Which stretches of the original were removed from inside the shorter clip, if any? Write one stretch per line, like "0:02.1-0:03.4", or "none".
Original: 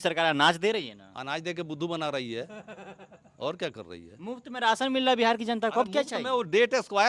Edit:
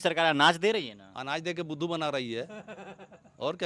none

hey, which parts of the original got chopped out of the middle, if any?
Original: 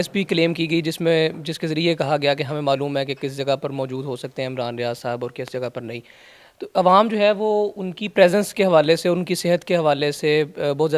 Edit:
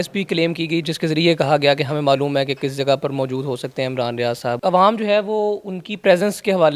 0:00.9-0:01.5
0:05.2-0:06.7

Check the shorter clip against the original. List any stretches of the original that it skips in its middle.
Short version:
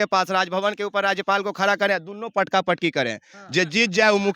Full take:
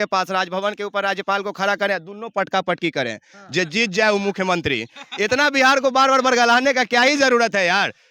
none

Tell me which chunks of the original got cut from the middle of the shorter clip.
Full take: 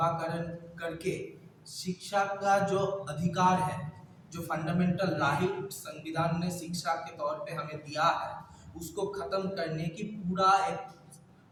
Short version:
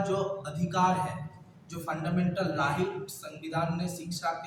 none

